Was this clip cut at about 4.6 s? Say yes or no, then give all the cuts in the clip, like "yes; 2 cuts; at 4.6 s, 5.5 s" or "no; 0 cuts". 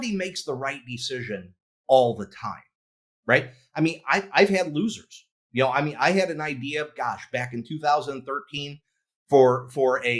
no; 0 cuts